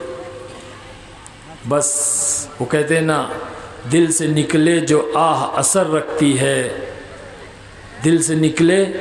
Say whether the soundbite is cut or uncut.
uncut